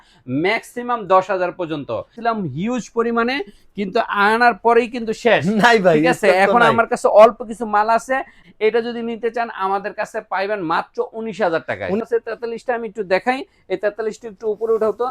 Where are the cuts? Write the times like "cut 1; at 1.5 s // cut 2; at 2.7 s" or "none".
cut 1; at 2.1 s // cut 2; at 8.4 s // cut 3; at 12.0 s